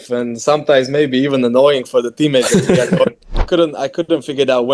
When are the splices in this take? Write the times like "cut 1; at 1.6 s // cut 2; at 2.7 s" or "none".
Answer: cut 1; at 3.4 s